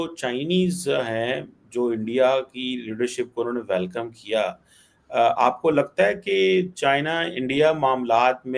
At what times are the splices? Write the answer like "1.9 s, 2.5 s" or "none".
none